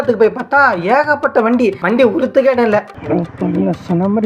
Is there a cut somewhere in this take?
yes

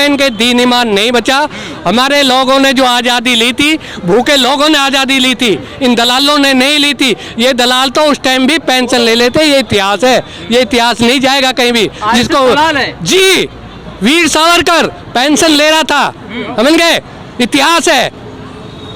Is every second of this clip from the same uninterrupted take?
yes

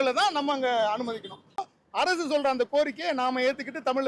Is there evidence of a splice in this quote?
yes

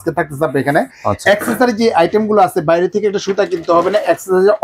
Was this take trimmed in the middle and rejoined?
no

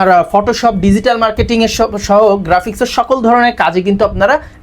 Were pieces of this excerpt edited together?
no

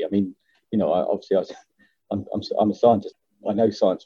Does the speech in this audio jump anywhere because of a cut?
yes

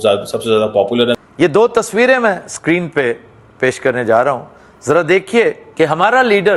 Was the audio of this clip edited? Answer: yes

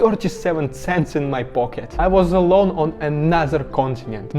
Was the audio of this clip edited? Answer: yes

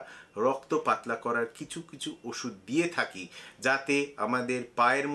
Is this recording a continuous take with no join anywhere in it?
yes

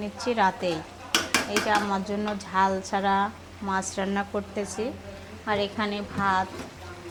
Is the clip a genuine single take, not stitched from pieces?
yes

